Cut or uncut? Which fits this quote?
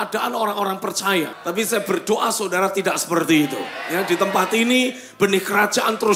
cut